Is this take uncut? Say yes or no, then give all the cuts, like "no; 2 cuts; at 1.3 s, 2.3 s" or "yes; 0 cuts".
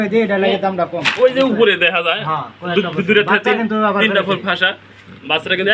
yes; 0 cuts